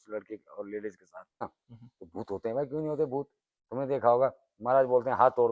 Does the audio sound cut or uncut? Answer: cut